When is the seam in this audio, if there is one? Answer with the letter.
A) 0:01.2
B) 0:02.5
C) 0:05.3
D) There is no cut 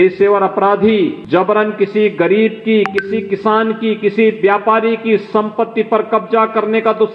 A